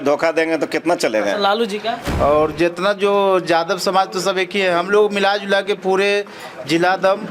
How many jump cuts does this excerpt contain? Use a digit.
1